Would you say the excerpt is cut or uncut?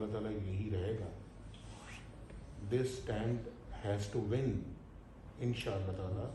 uncut